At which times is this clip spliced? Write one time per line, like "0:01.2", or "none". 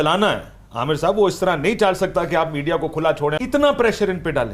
0:03.3

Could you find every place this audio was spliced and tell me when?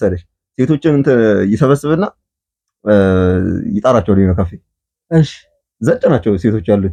none

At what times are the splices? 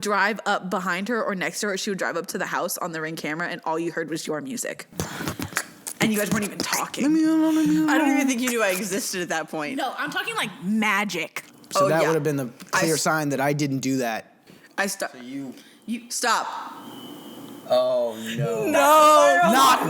0:11.4

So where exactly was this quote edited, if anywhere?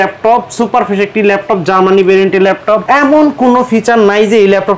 0:02.8

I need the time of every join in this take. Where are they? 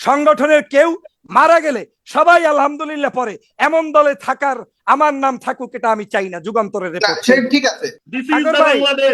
0:08.0

